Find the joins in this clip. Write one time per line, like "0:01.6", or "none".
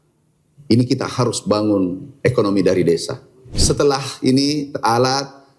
0:03.6